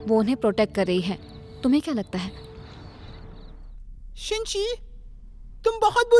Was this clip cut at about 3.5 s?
yes; 1 cut; at 3.5 s

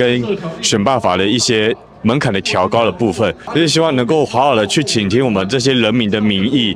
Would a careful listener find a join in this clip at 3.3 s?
no; 0 cuts

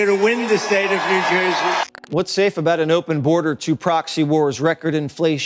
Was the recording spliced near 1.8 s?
yes; 1 cut; at 1.8 s

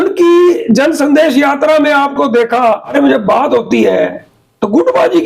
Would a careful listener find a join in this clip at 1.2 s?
no; 1 cut; at 2.9 s

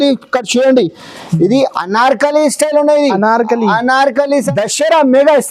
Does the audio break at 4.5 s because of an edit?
yes; 1 cut; at 4.5 s

